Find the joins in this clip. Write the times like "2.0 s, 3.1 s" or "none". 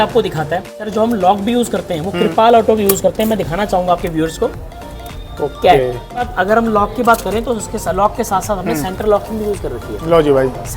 0.8 s, 6.3 s